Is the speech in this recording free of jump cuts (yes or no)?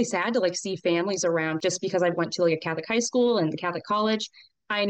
no